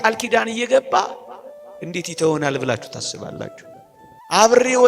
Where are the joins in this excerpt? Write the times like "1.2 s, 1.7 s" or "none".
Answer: 3.7 s

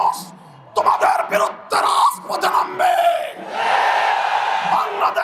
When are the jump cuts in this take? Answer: none

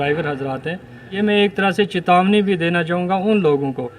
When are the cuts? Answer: 1.2 s

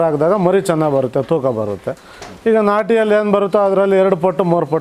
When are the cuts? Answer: none

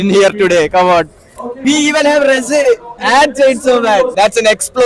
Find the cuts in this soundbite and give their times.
1.6 s, 2.9 s, 4.1 s

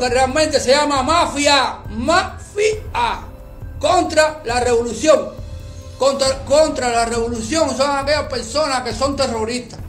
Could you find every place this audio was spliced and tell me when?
none

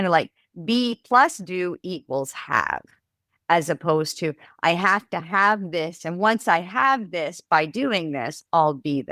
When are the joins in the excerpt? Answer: none

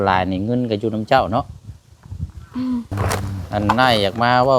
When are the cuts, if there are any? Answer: 2.9 s

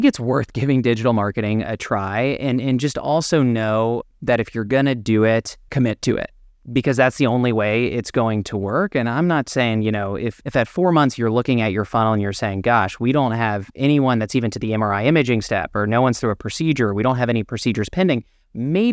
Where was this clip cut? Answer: 5.6 s, 6.5 s, 10.3 s

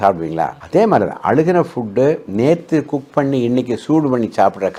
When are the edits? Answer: none

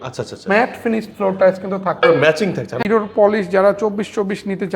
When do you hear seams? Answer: 2.8 s

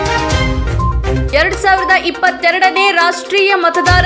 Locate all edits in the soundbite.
0.9 s

